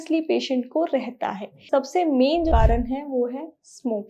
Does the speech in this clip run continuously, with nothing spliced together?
no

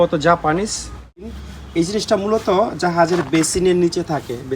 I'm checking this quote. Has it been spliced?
yes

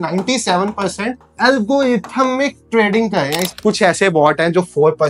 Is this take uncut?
no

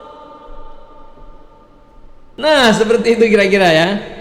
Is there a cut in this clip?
yes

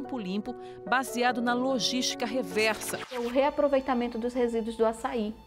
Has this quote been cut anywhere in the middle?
yes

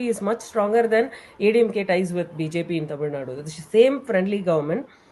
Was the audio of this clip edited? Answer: no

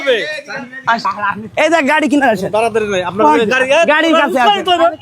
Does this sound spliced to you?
yes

